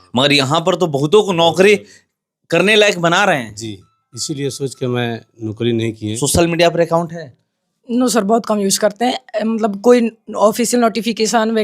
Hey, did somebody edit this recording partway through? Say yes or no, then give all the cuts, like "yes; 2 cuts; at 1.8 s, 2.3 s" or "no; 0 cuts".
yes; 1 cut; at 6.1 s